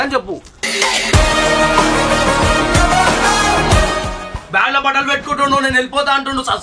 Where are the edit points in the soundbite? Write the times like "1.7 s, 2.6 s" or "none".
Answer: 4.2 s